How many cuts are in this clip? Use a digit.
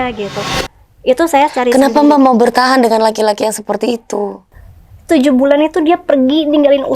1